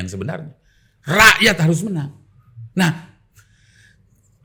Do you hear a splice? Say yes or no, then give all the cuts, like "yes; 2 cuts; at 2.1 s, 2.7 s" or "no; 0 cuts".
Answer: no; 0 cuts